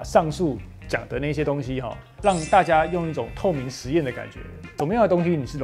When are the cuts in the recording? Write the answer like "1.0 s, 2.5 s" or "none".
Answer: 4.7 s